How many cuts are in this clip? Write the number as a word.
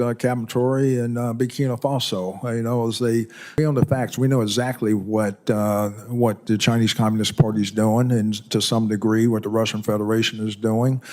one